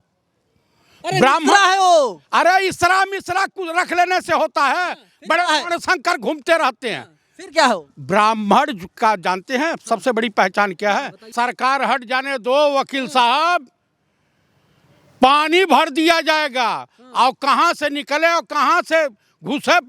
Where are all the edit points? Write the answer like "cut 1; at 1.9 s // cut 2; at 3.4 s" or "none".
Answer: cut 1; at 11.3 s